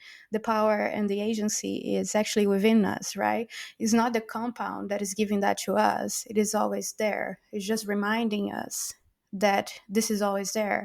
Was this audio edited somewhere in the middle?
no; 0 cuts

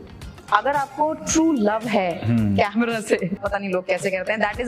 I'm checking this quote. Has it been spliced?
yes; 1 cut; at 3.4 s

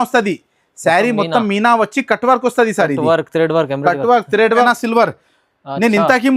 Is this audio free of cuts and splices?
no; 1 cut; at 4.7 s

